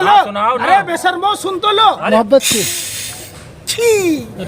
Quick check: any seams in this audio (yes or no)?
yes